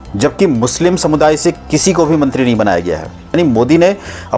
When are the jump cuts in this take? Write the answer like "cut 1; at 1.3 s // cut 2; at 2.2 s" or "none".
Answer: cut 1; at 3.3 s